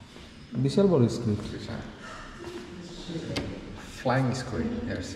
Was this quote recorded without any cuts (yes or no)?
yes